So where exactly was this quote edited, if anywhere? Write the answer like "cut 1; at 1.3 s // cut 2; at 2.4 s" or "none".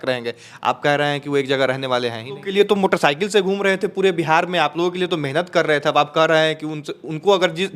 cut 1; at 2.3 s